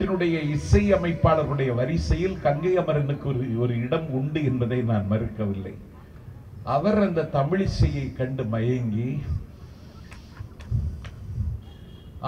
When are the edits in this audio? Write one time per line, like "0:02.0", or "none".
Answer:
none

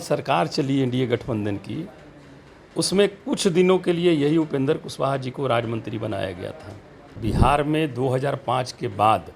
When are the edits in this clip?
0:07.2

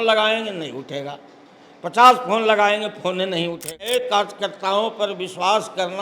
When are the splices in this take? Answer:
0:03.7

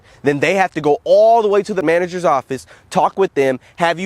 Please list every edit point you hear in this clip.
0:01.8

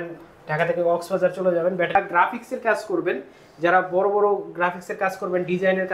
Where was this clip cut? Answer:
0:01.9

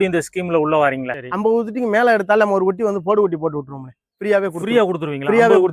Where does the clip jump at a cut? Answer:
0:01.1

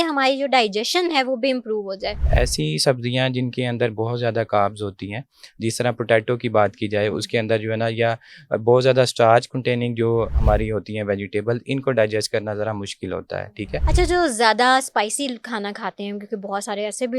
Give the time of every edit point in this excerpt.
0:02.2
0:10.3
0:13.8

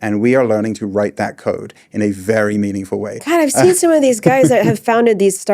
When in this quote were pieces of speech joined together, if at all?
0:03.2

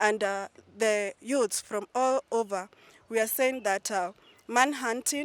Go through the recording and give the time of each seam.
none

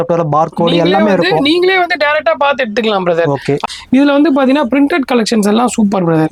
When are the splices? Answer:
none

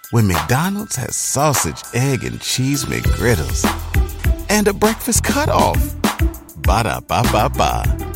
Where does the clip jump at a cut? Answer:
none

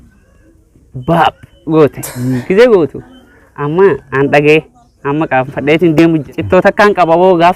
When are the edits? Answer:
0:06.3

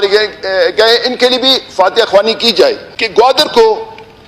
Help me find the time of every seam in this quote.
0:03.2

